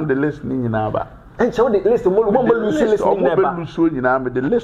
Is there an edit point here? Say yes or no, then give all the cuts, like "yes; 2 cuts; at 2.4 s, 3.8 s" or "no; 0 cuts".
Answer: no; 0 cuts